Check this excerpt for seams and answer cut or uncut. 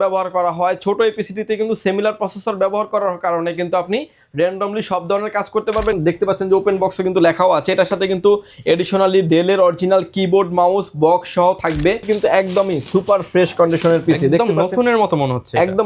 cut